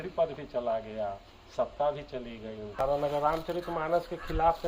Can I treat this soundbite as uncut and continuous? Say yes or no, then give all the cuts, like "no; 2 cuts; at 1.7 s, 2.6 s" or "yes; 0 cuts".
no; 1 cut; at 2.8 s